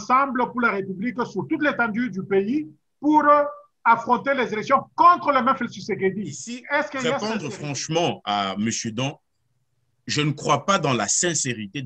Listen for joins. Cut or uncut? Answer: cut